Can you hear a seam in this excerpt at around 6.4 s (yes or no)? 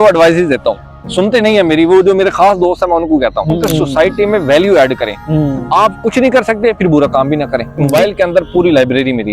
no